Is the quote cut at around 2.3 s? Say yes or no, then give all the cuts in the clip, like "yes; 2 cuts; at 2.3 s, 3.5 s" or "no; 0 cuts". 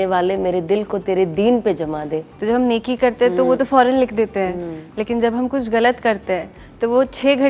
yes; 1 cut; at 2.3 s